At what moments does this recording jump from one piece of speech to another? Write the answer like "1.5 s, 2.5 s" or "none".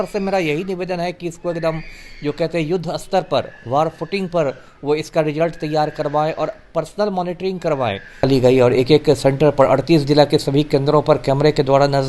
8.2 s